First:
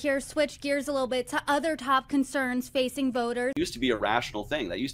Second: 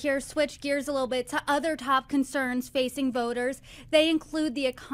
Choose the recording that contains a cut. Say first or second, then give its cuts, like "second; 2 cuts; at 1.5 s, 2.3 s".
second; 1 cut; at 3.5 s